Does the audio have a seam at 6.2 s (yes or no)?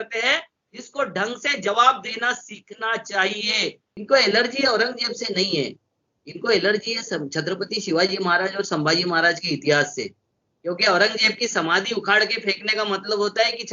no